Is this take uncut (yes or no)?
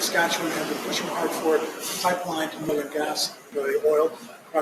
no